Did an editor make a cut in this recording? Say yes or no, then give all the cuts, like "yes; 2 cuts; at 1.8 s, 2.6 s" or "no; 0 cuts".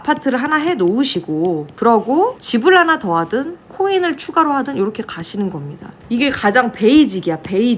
yes; 3 cuts; at 1.7 s, 2.4 s, 6.0 s